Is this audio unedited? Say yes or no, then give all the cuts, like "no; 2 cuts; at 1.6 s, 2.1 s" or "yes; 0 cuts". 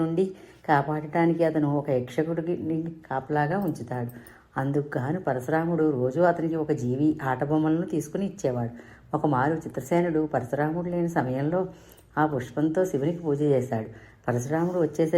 yes; 0 cuts